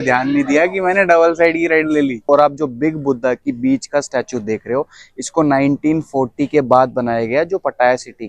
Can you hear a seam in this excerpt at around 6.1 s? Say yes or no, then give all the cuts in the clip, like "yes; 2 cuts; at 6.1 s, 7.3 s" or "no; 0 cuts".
no; 1 cut; at 2.2 s